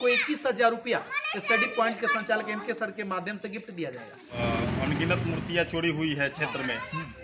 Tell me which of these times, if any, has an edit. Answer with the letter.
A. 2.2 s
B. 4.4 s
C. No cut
B